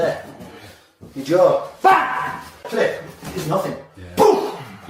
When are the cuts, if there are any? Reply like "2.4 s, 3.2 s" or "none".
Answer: 2.7 s